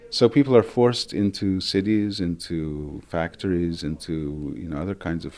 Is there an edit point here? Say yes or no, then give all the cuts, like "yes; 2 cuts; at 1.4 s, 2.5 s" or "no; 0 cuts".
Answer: no; 0 cuts